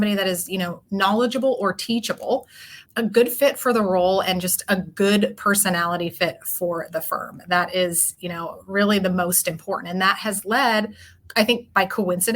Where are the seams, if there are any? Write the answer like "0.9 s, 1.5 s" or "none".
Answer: none